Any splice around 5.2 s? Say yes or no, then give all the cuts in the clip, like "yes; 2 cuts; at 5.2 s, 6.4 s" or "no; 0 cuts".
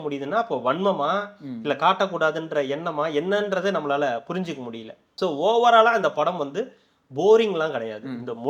no; 0 cuts